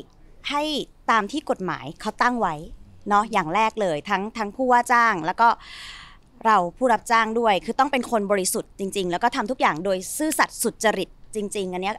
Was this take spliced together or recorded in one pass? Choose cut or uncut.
uncut